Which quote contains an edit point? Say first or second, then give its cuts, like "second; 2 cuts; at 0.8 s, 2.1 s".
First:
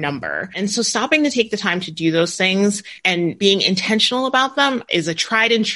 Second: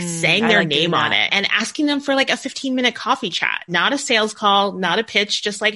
first; 2 cuts; at 2.9 s, 4.8 s